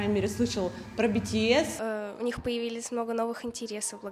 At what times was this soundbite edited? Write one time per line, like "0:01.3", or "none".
0:01.8